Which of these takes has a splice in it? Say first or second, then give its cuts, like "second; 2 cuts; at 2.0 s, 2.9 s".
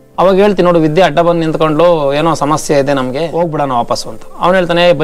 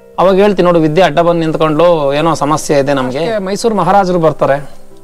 second; 1 cut; at 3.3 s